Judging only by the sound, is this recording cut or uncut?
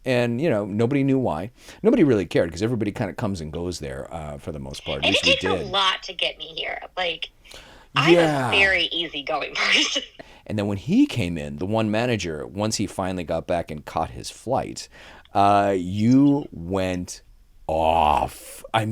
cut